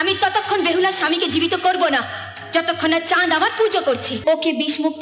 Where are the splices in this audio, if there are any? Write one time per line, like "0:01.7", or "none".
0:04.1